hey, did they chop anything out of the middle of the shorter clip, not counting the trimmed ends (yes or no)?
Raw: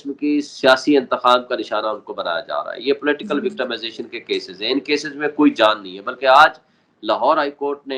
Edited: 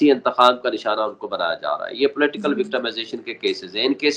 no